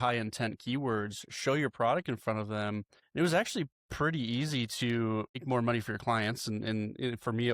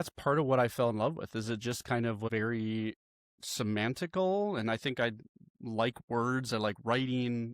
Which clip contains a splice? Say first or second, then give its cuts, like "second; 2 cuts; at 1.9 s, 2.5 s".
second; 1 cut; at 2.3 s